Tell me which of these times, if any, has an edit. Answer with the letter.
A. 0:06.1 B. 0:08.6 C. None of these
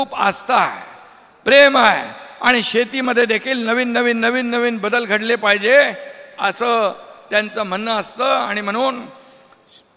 C